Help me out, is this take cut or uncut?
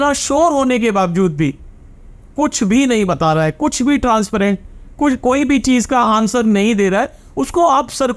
uncut